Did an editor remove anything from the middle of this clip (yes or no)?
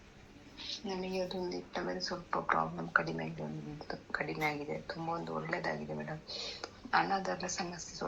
no